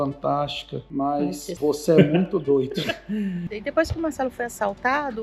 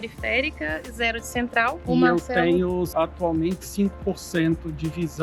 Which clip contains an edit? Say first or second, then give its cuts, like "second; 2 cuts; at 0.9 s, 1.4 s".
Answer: first; 2 cuts; at 1.5 s, 3.5 s